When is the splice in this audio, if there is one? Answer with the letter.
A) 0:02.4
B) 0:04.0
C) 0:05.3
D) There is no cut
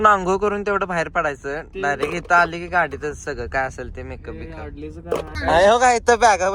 C